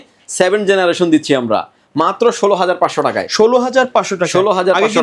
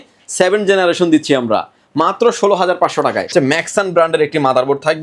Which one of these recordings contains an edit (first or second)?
second